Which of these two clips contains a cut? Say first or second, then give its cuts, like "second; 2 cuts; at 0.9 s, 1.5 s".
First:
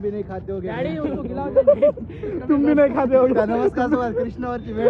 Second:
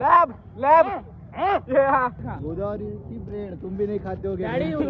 second; 1 cut; at 2.2 s